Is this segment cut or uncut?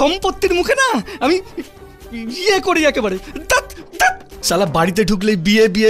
cut